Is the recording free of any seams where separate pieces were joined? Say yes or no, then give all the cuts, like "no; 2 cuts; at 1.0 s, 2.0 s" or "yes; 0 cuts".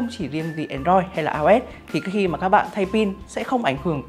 yes; 0 cuts